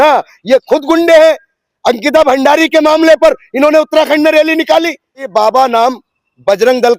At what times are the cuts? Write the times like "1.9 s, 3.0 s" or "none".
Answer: 5.3 s